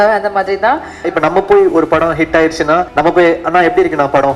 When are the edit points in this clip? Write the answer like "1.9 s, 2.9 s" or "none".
1.1 s, 2.9 s

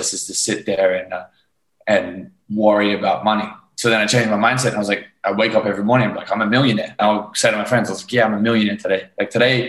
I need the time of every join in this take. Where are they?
7.0 s

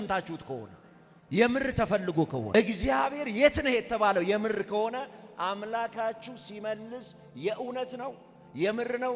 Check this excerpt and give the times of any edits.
2.5 s

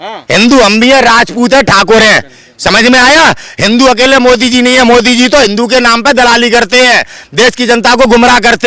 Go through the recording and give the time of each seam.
none

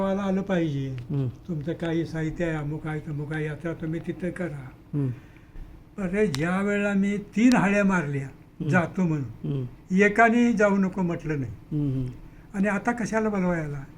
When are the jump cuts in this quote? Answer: none

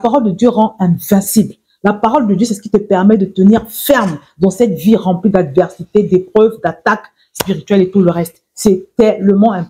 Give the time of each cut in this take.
none

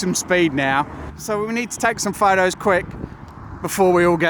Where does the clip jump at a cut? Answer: 1.1 s

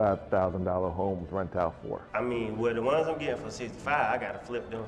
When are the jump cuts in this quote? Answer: 2.0 s

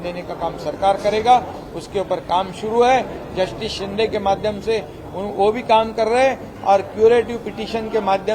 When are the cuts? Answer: none

